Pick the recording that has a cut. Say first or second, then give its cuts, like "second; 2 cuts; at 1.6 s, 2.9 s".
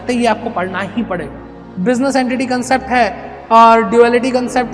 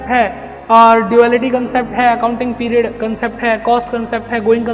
first; 1 cut; at 1.7 s